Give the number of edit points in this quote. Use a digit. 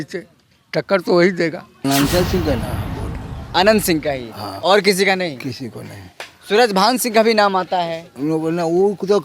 1